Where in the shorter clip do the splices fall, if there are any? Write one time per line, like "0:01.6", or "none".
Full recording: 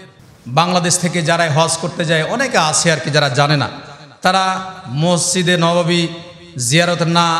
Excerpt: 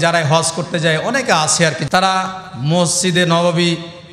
0:01.8